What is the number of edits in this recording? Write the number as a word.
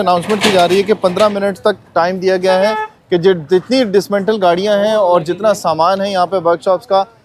zero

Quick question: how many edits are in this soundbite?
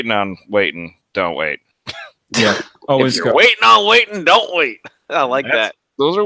zero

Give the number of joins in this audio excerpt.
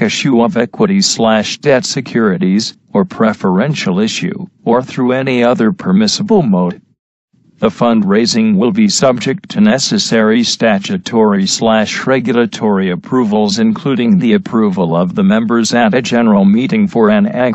zero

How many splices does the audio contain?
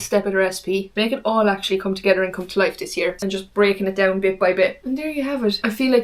one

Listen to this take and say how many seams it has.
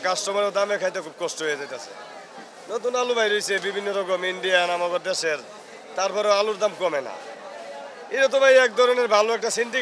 zero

